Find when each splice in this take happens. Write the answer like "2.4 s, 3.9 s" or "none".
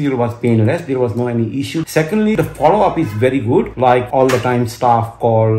none